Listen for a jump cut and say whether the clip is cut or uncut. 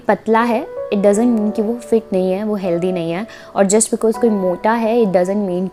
uncut